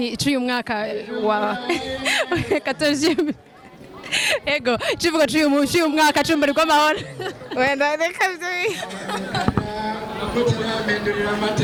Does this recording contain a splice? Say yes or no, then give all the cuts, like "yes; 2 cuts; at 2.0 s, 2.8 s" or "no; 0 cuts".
no; 0 cuts